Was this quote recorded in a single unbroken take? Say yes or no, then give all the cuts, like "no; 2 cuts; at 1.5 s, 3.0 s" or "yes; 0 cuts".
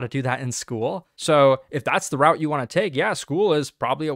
no; 1 cut; at 1.1 s